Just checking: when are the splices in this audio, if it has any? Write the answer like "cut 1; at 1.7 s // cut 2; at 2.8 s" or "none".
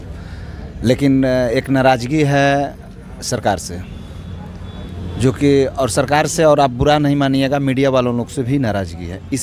none